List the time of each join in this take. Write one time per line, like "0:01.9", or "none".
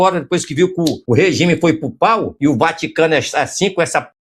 0:01.0
0:02.3